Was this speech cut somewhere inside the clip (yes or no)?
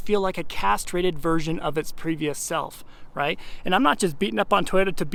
no